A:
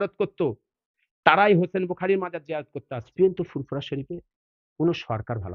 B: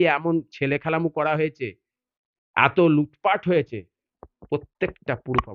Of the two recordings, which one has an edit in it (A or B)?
A